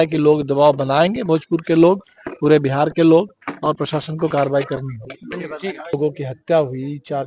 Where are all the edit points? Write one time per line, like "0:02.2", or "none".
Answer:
0:05.9